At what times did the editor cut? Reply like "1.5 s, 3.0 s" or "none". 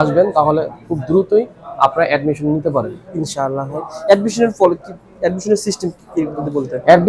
none

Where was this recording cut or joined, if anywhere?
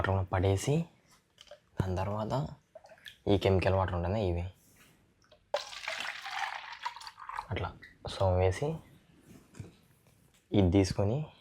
none

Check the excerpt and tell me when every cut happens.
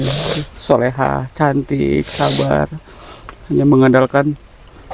none

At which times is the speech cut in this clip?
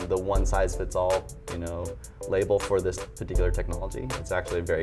none

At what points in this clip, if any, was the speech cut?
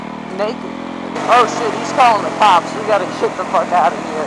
1.2 s

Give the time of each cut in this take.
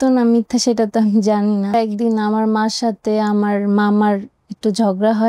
1.7 s

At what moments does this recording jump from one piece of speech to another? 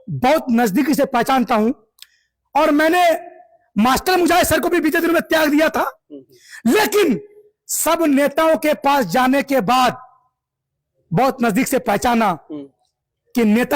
none

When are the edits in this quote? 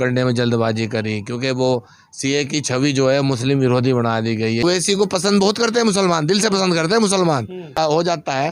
4.6 s, 7.8 s

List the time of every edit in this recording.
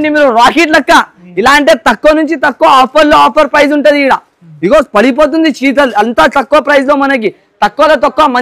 none

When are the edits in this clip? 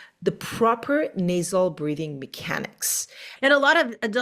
3.2 s

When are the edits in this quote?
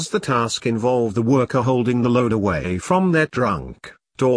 1.1 s

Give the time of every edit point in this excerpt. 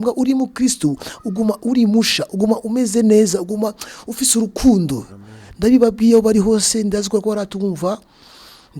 none

